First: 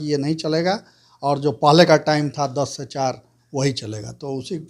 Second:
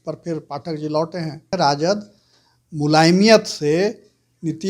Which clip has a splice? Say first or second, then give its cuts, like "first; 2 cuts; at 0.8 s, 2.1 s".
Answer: second; 1 cut; at 1.5 s